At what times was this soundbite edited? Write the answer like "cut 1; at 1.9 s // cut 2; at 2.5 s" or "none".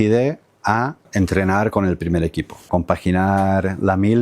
cut 1; at 1.1 s // cut 2; at 2.7 s

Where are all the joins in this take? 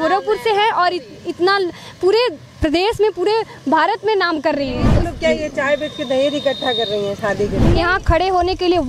cut 1; at 5.0 s // cut 2; at 7.6 s

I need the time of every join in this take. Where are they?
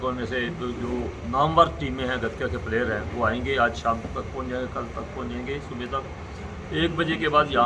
none

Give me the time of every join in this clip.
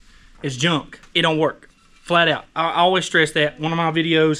cut 1; at 1.0 s

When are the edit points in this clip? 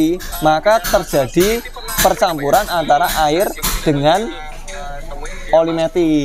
none

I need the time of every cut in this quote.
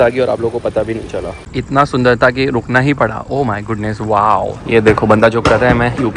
cut 1; at 1.5 s // cut 2; at 4.6 s

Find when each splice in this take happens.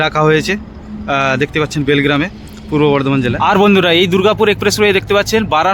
cut 1; at 3.3 s

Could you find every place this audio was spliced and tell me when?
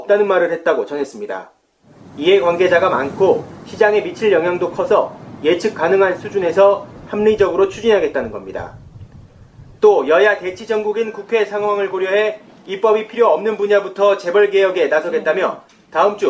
cut 1; at 11.8 s

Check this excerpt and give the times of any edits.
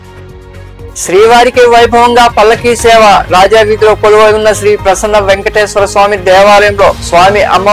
none

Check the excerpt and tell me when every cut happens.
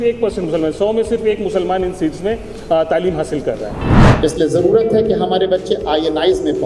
cut 1; at 3.9 s

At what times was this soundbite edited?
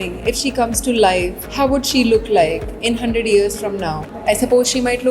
cut 1; at 1.4 s // cut 2; at 4.1 s

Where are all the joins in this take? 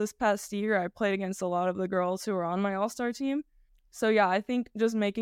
none

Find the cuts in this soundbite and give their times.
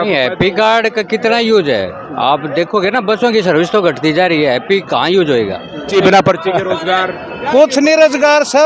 cut 1; at 5.9 s

